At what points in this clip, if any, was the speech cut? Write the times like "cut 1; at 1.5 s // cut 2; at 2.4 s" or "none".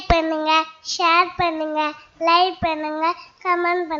none